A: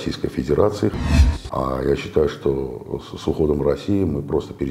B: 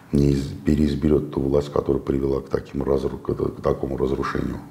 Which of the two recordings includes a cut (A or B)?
A